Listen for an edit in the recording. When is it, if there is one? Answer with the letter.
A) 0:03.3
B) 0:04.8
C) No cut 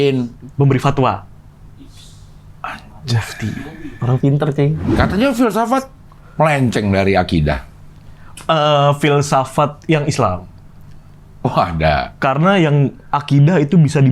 B